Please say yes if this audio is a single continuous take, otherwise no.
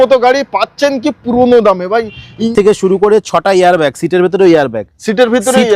no